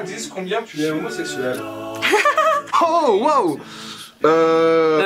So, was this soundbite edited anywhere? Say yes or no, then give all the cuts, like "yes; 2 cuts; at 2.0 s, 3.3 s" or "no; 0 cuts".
no; 0 cuts